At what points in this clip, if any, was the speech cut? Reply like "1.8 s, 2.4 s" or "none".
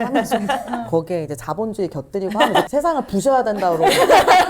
2.7 s